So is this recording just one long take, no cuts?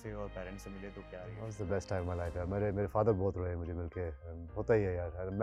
yes; 0 cuts

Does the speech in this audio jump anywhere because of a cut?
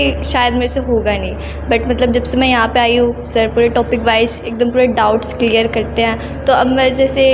no; 0 cuts

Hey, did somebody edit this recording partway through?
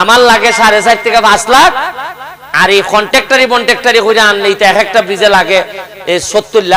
no; 0 cuts

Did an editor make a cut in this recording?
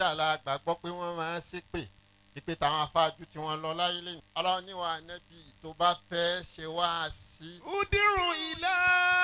yes; 1 cut; at 4.1 s

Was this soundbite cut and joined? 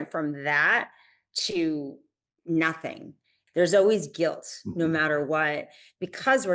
yes; 1 cut; at 3.4 s

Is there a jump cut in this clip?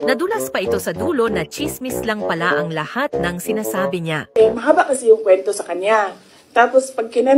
yes; 1 cut; at 4.6 s

